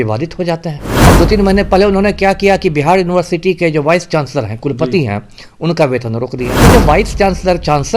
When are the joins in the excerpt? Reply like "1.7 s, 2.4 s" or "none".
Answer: 0.9 s, 6.5 s